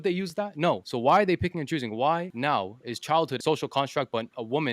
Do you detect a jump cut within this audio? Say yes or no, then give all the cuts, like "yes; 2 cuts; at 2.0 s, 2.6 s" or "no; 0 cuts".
yes; 3 cuts; at 0.9 s, 2.3 s, 3.4 s